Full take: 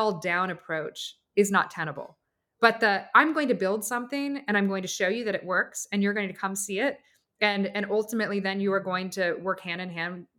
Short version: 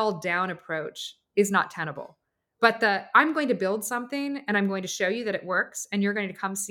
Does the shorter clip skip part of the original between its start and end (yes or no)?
no